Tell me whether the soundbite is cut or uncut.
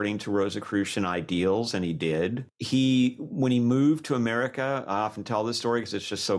cut